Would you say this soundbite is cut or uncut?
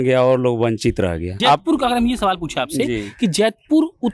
cut